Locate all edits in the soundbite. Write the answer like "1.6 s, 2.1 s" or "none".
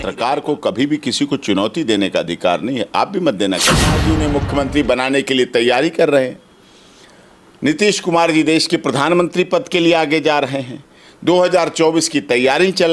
4.0 s